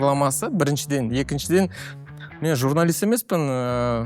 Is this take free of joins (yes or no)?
yes